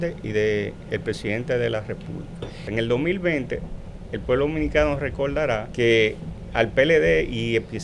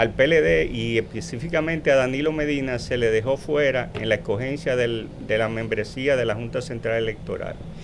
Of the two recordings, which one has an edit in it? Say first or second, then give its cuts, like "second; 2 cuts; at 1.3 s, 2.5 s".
first; 2 cuts; at 2.6 s, 5.7 s